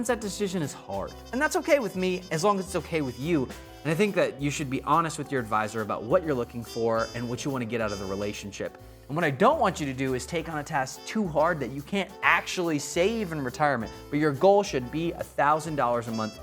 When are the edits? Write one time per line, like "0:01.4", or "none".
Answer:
0:01.2
0:09.0

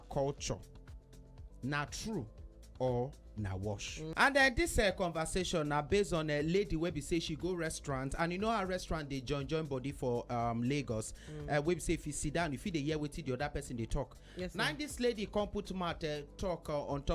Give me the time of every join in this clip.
0:04.0

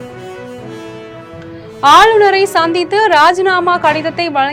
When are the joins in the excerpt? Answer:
none

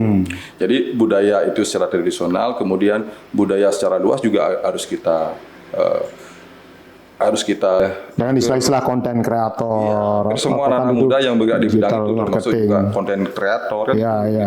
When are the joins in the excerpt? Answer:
0:07.8

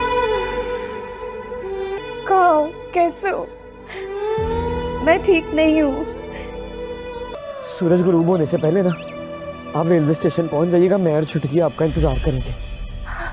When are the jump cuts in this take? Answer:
0:01.8

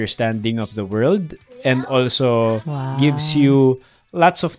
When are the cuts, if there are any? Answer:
none

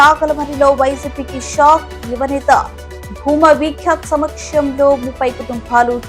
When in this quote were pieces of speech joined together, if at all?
none

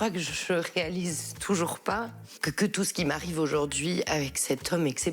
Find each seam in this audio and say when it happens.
0:02.3

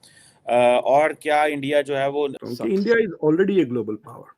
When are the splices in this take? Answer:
0:02.4

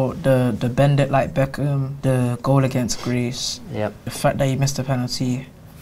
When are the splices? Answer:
0:01.9
0:04.1

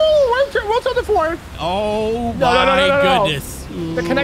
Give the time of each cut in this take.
0:01.5

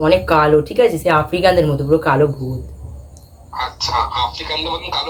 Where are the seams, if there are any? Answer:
none

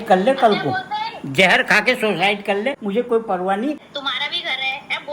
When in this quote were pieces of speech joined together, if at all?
0:02.8
0:03.8

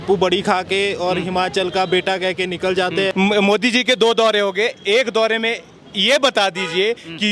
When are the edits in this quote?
0:03.1

